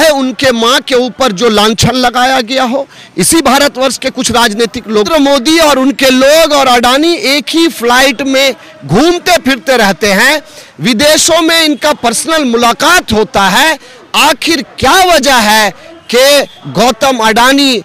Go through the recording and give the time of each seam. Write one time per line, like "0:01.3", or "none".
0:05.1